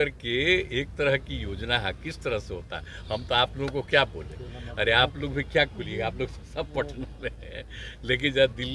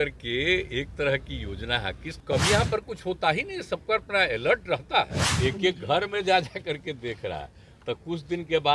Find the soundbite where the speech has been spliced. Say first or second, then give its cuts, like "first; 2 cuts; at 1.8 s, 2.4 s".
second; 2 cuts; at 2.1 s, 5.2 s